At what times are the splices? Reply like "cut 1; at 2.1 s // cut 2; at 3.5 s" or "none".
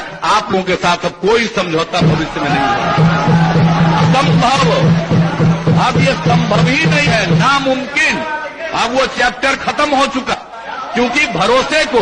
none